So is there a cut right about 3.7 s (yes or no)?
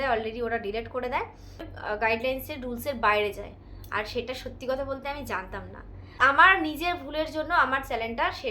no